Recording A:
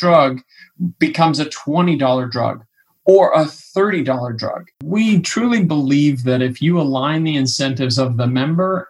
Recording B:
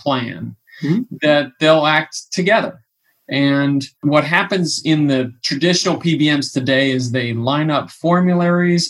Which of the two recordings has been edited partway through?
A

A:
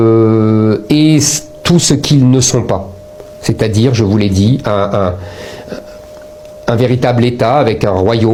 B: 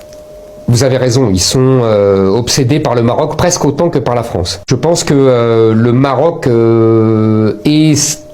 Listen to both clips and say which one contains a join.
B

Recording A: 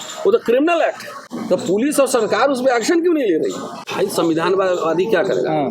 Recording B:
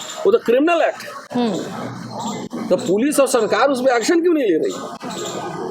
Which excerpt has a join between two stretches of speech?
A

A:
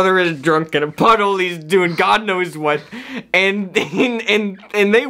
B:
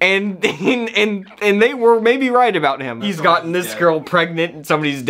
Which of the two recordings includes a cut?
B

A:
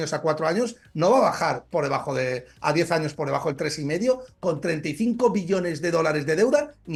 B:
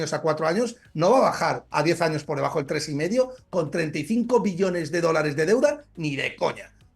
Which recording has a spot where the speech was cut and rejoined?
B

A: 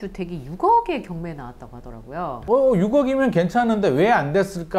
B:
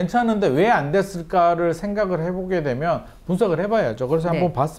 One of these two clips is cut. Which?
A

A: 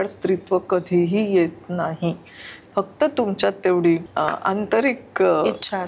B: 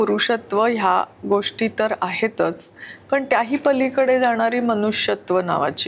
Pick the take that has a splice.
A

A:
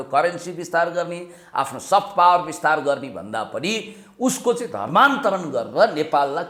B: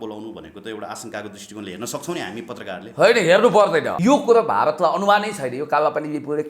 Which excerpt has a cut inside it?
B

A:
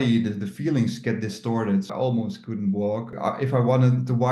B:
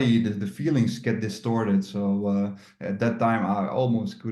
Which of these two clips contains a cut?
A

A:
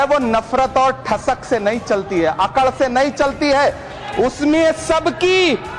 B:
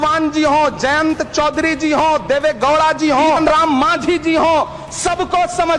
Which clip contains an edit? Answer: B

